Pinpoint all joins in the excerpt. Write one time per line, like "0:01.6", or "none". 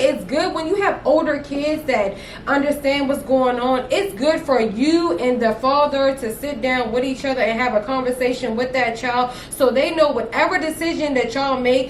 none